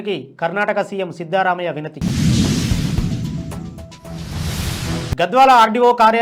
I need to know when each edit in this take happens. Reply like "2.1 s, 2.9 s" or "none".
2.1 s, 5.1 s